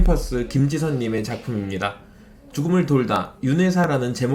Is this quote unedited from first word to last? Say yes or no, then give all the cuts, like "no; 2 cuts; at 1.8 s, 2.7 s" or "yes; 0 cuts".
yes; 0 cuts